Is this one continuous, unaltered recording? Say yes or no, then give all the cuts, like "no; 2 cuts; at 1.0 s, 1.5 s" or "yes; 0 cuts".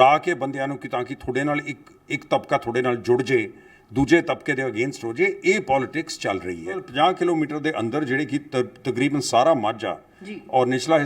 no; 1 cut; at 6.9 s